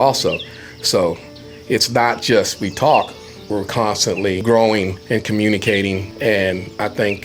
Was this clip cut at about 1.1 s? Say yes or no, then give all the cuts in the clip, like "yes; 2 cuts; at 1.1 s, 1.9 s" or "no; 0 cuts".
no; 3 cuts; at 4.4 s, 5.0 s, 6.1 s